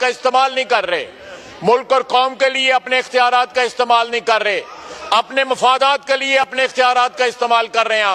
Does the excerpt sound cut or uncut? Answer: uncut